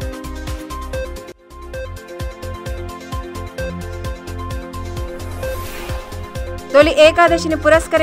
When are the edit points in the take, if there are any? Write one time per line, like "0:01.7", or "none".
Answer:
0:01.0

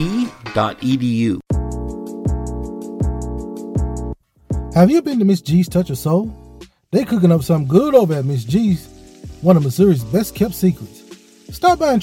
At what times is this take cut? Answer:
0:01.4

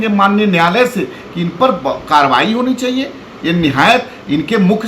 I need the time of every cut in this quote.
none

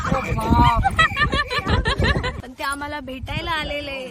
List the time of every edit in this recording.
0:02.4

